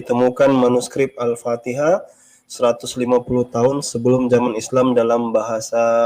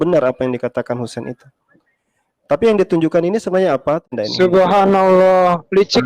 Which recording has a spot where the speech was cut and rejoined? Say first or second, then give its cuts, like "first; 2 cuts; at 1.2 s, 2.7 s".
second; 1 cut; at 4.1 s